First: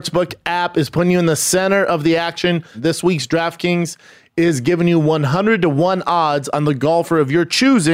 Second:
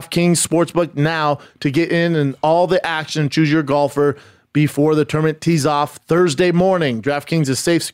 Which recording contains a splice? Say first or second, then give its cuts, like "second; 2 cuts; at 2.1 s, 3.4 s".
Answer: first; 1 cut; at 2.8 s